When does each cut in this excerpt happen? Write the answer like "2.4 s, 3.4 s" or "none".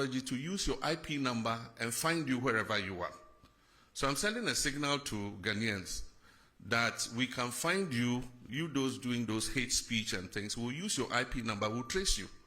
3.2 s